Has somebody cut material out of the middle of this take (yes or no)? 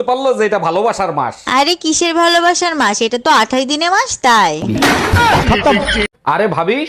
no